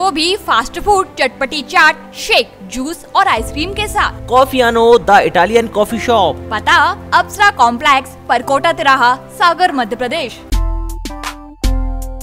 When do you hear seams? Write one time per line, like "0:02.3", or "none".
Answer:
0:10.4